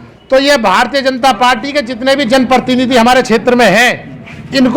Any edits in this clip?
no; 0 cuts

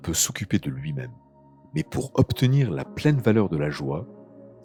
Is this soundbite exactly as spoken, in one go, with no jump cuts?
yes; 0 cuts

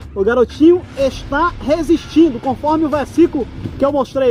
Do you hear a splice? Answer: no; 0 cuts

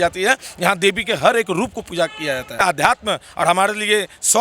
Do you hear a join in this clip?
yes; 1 cut; at 2.6 s

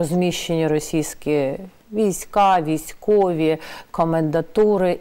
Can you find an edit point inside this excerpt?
no; 0 cuts

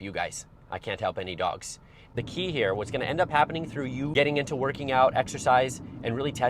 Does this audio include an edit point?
yes; 2 cuts; at 2.0 s, 4.1 s

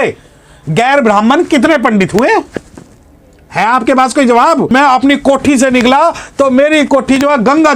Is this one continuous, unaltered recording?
no; 1 cut; at 4.7 s

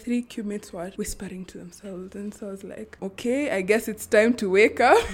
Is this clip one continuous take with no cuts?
no; 2 cuts; at 0.9 s, 3.0 s

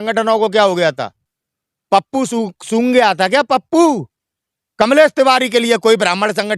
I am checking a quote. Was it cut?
no; 0 cuts

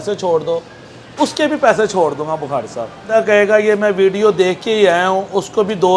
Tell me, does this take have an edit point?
yes; 1 cut; at 3.1 s

